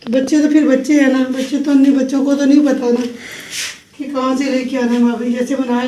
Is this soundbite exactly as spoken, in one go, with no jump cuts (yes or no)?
yes